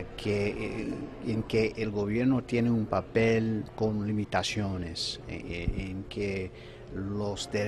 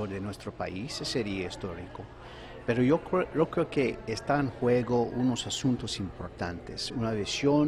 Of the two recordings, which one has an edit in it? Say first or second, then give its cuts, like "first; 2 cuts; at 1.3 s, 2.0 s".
first; 1 cut; at 4.3 s